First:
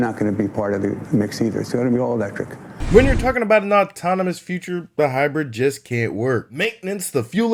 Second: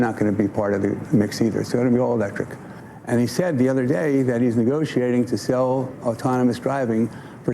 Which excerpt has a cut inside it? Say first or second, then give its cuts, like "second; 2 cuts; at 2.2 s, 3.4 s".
second; 1 cut; at 2.7 s